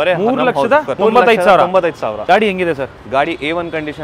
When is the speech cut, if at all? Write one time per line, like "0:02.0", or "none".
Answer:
0:00.9
0:02.2